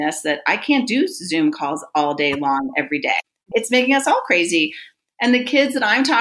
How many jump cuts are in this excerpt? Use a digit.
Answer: 1